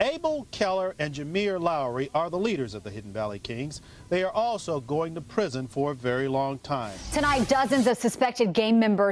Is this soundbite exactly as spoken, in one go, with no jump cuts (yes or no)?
no